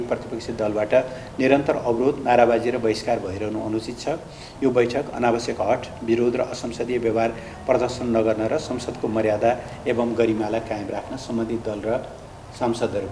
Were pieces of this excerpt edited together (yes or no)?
no